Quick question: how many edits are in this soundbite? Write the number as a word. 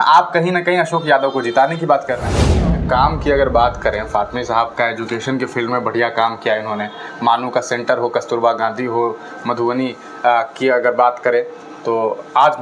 one